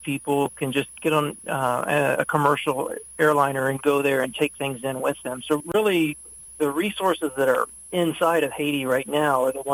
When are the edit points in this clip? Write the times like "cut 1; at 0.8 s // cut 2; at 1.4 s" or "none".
none